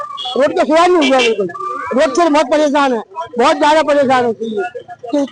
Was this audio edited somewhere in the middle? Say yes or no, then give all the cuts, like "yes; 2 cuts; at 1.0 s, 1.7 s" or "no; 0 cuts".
no; 0 cuts